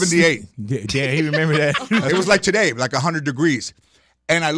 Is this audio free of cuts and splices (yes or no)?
no